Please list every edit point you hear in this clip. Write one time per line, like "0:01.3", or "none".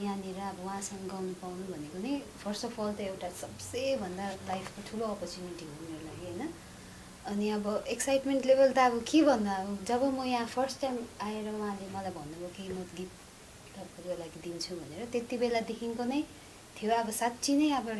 none